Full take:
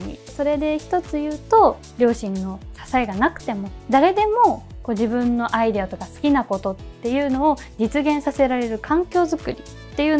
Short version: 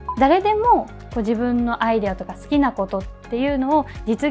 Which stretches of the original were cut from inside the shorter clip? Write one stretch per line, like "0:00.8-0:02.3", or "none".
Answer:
none